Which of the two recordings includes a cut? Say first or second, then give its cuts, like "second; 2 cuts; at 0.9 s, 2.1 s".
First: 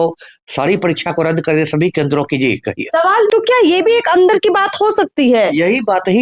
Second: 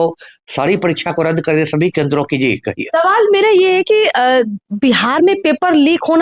first; 1 cut; at 3.3 s